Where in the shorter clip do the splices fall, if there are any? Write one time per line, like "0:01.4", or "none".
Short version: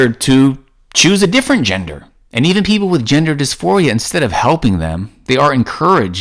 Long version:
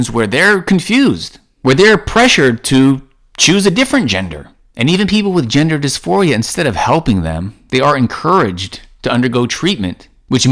none